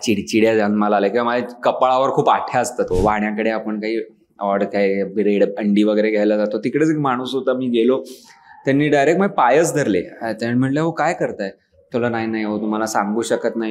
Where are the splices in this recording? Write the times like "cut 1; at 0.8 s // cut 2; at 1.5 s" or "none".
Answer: cut 1; at 2.9 s